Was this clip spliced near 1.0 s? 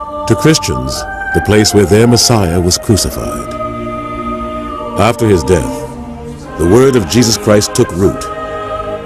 no; 0 cuts

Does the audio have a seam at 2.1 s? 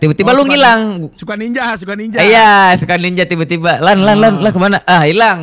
no; 0 cuts

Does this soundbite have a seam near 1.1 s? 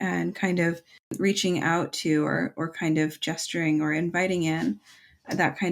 yes; 1 cut; at 1.1 s

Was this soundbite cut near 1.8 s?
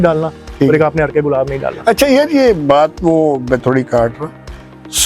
no; 0 cuts

